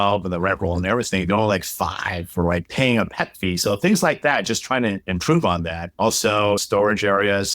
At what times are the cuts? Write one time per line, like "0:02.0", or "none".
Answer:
0:06.6